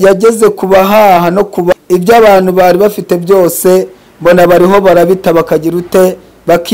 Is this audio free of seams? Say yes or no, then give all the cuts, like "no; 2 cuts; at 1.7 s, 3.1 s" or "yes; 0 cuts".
no; 1 cut; at 1.7 s